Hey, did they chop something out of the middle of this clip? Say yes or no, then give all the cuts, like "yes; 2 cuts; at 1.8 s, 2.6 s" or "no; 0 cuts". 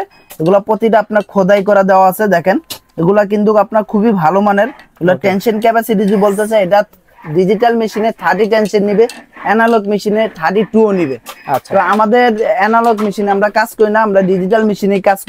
no; 0 cuts